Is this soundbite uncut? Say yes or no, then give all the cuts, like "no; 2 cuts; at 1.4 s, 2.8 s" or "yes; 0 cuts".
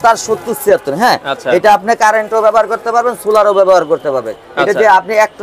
yes; 0 cuts